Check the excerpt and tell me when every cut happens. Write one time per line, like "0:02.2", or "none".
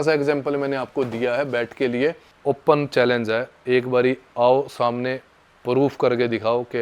0:02.3